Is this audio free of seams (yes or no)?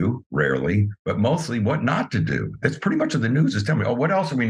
yes